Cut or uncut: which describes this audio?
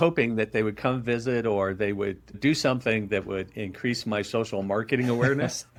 uncut